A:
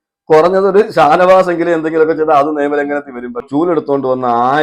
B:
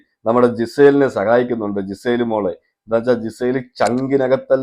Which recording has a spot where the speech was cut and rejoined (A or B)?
A